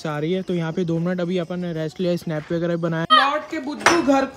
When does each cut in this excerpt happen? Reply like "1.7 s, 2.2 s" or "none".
3.1 s